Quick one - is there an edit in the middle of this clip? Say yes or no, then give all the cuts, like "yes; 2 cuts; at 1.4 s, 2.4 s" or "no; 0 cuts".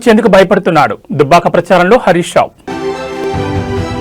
no; 0 cuts